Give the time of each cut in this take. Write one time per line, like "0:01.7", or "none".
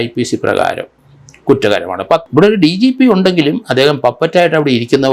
0:02.3